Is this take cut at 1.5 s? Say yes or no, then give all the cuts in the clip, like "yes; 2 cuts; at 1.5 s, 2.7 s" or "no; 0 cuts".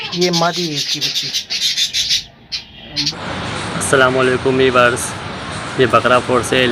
no; 1 cut; at 3.1 s